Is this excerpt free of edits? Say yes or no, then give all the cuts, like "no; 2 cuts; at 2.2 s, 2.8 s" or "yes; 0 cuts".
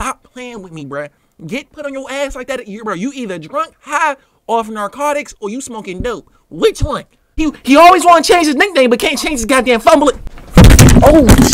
no; 2 cuts; at 7.2 s, 10.3 s